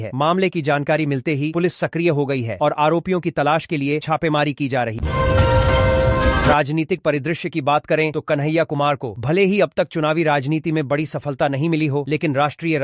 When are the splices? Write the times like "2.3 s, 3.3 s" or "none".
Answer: 5.0 s, 6.5 s